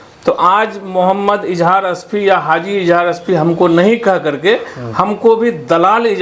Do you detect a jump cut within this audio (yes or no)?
no